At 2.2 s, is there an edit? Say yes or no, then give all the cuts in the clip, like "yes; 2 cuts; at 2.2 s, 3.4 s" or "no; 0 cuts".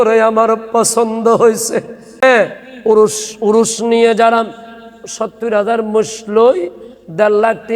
yes; 1 cut; at 2.2 s